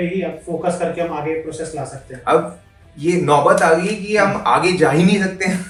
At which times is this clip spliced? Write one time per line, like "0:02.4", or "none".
none